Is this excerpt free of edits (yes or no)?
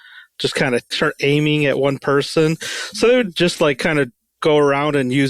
no